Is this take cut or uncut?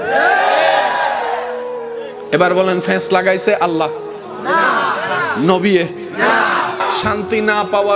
cut